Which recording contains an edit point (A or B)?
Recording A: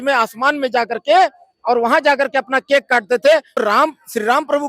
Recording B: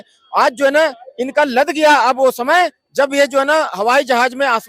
A